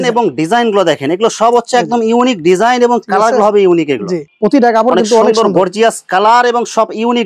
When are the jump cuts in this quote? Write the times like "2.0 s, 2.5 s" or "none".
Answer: none